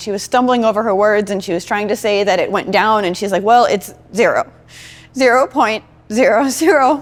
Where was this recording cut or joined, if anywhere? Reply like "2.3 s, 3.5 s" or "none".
none

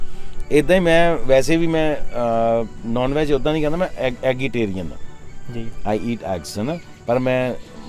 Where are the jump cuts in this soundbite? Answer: none

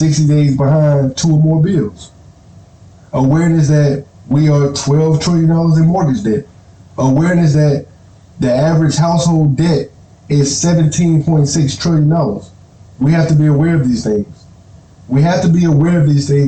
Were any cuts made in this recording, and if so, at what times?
none

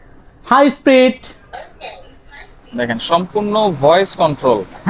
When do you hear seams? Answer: none

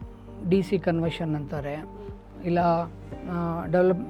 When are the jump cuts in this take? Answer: none

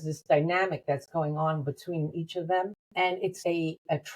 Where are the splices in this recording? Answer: 2.8 s

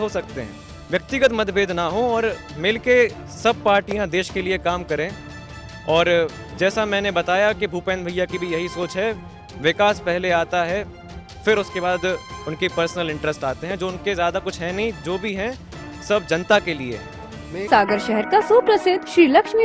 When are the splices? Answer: 17.7 s

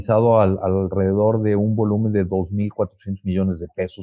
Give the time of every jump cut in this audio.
none

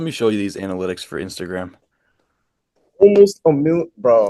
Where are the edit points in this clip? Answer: none

